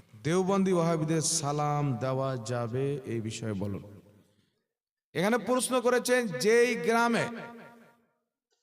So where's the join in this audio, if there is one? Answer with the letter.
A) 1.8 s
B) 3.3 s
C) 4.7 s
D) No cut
C